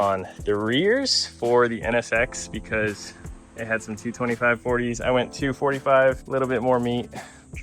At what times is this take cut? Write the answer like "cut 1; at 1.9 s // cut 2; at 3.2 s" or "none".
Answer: none